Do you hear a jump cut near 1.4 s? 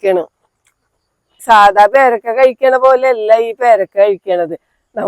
yes; 1 cut; at 1.4 s

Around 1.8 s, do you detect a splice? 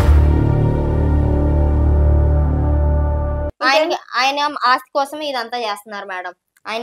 no; 1 cut; at 3.5 s

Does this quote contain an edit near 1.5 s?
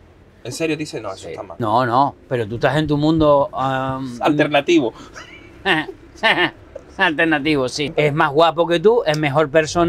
yes; 2 cuts; at 1.5 s, 7.8 s

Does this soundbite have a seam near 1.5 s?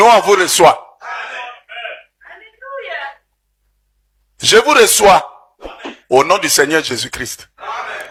no; 0 cuts

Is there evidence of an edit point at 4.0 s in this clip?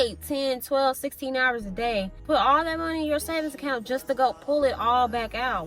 no; 1 cut; at 2.2 s

